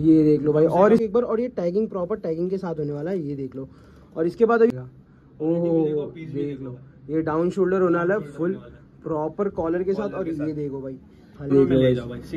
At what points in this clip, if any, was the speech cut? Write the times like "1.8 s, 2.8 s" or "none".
1.0 s, 4.7 s, 11.5 s